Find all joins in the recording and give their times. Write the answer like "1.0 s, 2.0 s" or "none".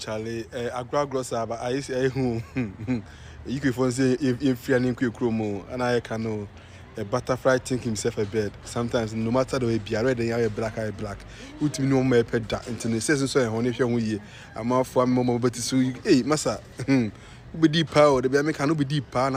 none